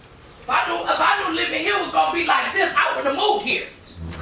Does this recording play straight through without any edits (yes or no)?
yes